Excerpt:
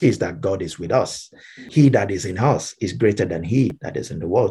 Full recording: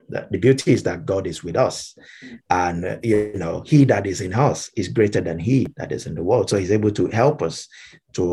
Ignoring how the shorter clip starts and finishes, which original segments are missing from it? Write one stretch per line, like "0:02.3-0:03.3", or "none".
0:02.3-0:03.6